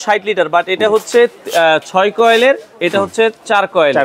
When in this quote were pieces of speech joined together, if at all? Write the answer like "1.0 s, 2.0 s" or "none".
none